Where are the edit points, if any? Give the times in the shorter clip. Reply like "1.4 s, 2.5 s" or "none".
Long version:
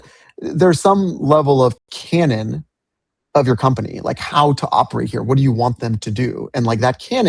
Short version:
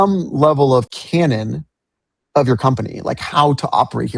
1.0 s